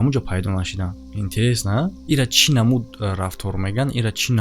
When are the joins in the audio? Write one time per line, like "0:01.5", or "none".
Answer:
none